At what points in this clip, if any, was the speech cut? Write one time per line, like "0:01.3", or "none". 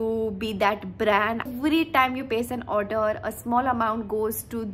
0:01.5